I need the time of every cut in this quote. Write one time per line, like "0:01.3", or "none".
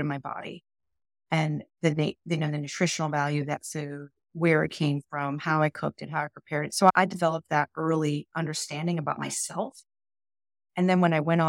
0:06.9